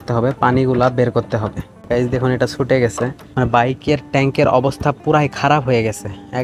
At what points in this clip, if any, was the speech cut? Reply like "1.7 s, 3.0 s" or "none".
3.2 s